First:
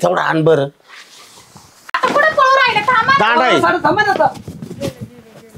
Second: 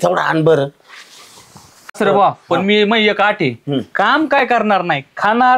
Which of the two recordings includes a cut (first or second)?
second